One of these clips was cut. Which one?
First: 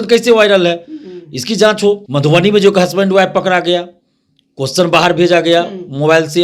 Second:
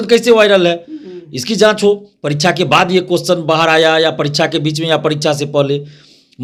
first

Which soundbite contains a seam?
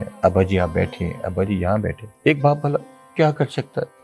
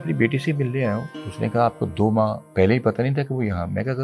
first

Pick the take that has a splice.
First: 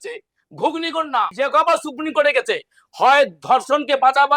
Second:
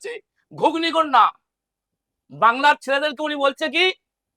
first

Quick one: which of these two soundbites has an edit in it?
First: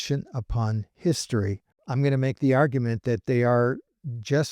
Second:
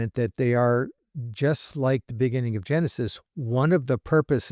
first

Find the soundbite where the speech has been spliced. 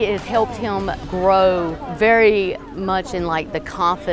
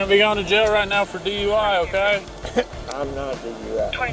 first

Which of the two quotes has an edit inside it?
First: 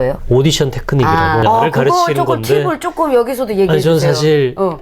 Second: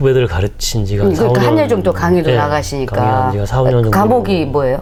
first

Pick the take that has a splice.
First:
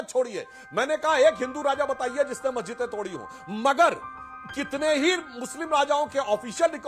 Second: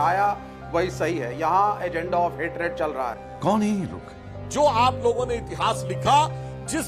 second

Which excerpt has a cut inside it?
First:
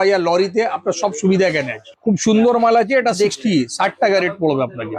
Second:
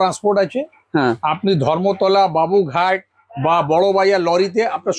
first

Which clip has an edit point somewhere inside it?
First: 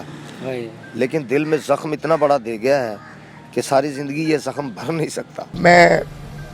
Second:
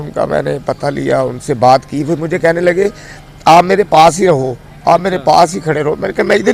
first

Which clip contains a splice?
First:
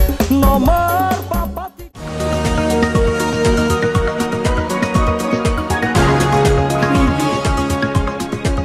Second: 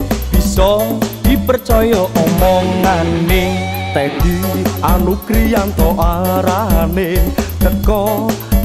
first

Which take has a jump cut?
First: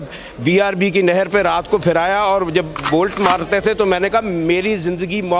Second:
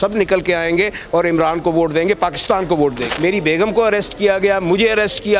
second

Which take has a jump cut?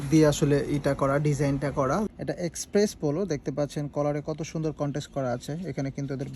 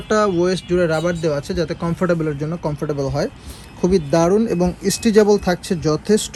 first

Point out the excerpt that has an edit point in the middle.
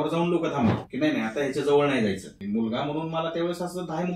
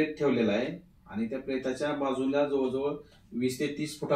first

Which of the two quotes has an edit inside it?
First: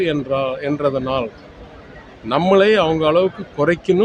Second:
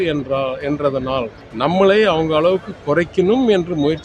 second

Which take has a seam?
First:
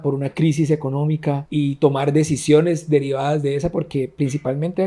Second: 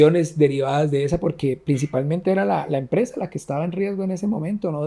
first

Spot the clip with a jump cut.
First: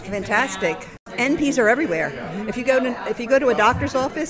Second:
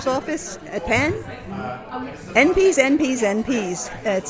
first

